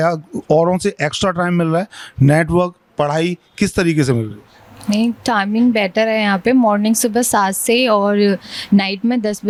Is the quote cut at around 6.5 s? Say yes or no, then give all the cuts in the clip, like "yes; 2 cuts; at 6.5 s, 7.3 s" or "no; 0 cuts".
no; 0 cuts